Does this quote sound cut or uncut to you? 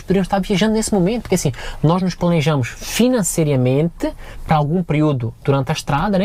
uncut